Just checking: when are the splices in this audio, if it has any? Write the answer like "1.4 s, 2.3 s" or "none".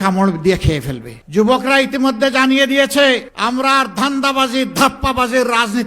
1.1 s